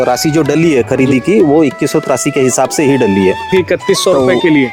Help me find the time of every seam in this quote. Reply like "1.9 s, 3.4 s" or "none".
3.5 s